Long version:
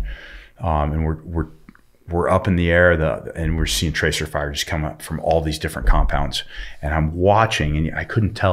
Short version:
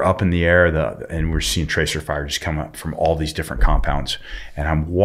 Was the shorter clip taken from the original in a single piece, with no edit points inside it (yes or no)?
yes